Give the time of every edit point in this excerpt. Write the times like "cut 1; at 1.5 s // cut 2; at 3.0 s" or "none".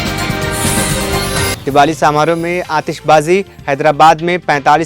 cut 1; at 1.5 s